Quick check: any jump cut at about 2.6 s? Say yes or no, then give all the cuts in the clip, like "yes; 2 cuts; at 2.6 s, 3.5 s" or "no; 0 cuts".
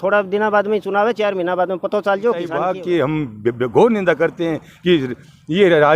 yes; 1 cut; at 2.6 s